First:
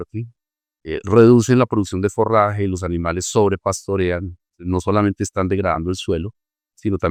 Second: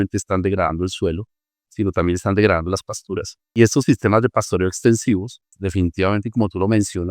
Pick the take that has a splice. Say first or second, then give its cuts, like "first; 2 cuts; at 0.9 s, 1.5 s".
second; 2 cuts; at 3.6 s, 5.6 s